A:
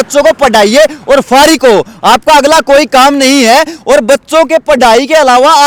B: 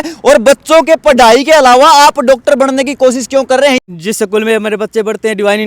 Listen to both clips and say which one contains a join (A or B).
B